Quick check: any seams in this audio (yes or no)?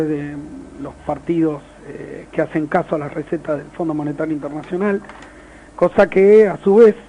no